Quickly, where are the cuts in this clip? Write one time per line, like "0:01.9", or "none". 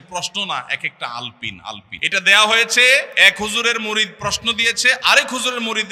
0:01.9
0:03.1